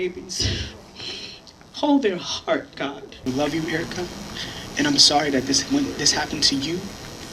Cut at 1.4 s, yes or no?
no